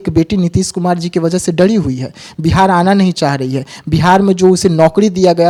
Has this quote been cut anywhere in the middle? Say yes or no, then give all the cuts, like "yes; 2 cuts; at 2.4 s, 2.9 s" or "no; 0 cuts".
no; 0 cuts